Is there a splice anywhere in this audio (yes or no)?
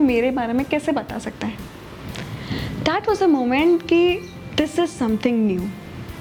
no